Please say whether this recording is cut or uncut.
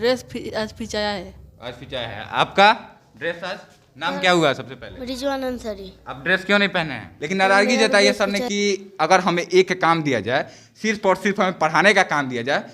cut